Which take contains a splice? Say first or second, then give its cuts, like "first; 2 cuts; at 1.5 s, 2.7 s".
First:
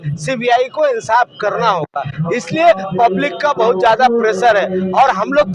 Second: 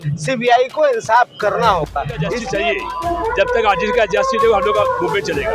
second; 1 cut; at 2.4 s